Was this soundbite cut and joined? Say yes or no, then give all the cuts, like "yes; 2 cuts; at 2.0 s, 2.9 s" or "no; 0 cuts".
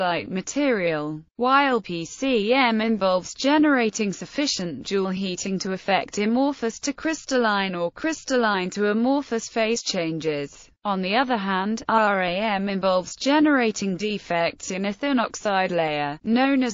no; 0 cuts